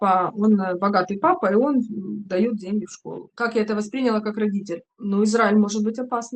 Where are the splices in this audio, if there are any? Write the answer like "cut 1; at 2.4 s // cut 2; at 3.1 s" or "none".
cut 1; at 3.3 s